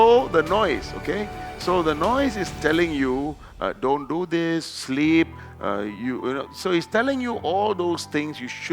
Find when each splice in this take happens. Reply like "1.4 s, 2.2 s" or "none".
none